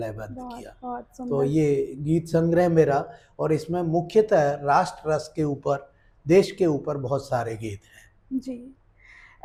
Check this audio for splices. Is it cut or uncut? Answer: uncut